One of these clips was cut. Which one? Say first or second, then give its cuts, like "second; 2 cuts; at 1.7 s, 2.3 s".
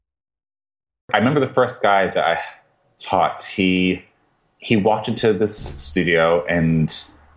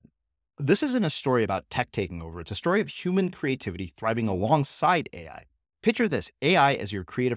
first; 1 cut; at 1.1 s